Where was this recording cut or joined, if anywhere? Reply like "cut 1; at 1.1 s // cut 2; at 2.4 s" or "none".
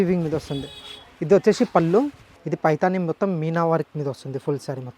cut 1; at 2.3 s